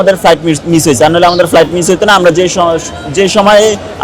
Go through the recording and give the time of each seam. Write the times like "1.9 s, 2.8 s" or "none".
none